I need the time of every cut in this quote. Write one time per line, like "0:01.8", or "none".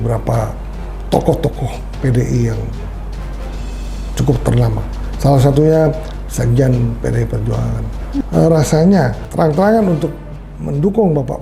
0:08.2